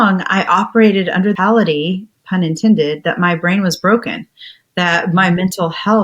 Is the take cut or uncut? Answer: cut